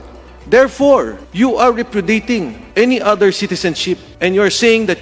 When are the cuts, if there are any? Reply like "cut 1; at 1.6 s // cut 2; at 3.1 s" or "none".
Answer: cut 1; at 1.2 s // cut 2; at 2.6 s // cut 3; at 4.1 s